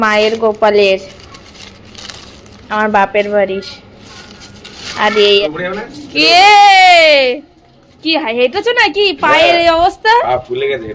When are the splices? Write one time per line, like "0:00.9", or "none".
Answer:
0:05.4